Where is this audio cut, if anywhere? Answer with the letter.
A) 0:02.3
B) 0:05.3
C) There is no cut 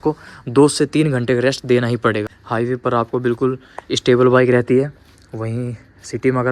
A